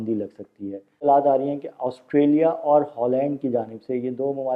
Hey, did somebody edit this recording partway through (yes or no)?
yes